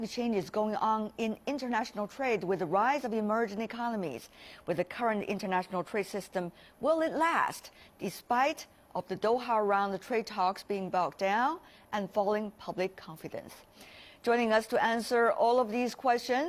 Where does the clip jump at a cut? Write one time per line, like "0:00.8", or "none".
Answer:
0:01.4